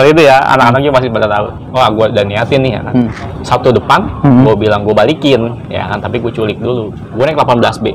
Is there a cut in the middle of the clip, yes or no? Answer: yes